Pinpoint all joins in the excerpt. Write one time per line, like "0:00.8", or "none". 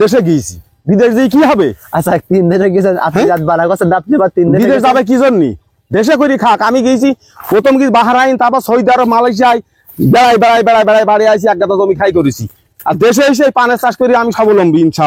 none

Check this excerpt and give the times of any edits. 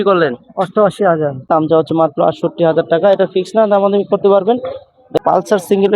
0:01.5
0:05.2

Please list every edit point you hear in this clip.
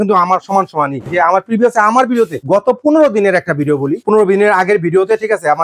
0:01.0
0:02.4
0:04.0

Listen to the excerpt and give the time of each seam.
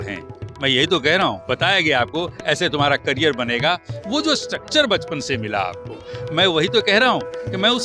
0:01.4

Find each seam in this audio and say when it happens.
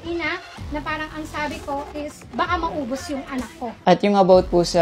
0:03.8

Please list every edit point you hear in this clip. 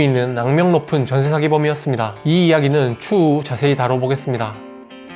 none

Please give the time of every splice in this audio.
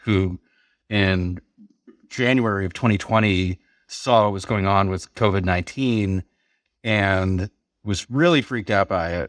none

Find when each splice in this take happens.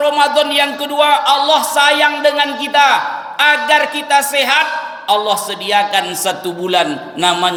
none

